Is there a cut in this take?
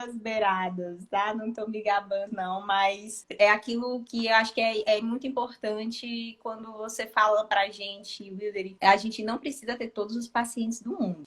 yes; 1 cut; at 3.2 s

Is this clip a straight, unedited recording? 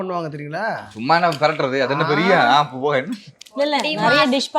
yes; 0 cuts

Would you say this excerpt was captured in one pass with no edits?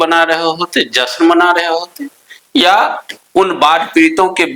yes; 0 cuts

